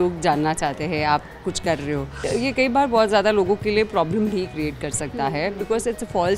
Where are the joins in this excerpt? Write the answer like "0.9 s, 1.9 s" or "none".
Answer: 2.2 s